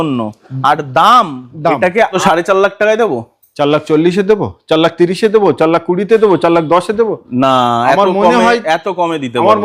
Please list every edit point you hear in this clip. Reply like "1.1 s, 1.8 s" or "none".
2.2 s